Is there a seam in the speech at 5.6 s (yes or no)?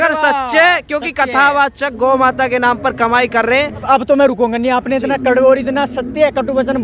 no